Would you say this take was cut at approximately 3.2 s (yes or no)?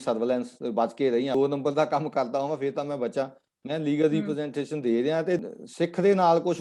no